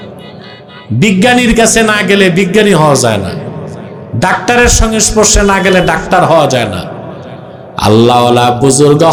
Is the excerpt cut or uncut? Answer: uncut